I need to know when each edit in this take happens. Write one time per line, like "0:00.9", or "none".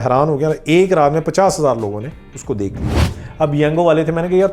0:03.2